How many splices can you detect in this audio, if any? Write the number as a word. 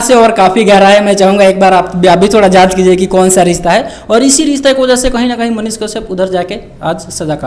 zero